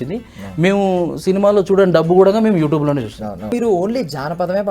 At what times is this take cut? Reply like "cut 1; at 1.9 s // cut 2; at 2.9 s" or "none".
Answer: cut 1; at 3.5 s